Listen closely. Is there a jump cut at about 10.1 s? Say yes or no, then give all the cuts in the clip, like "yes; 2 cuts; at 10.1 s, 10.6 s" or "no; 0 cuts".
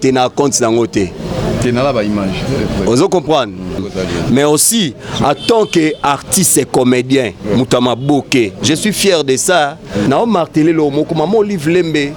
yes; 2 cuts; at 3.8 s, 10.1 s